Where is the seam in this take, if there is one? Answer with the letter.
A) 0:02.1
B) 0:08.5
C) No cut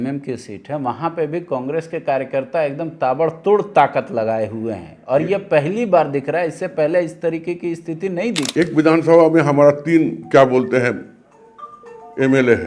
B